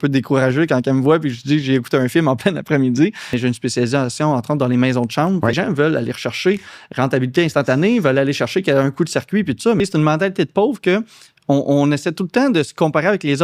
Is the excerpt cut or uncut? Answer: cut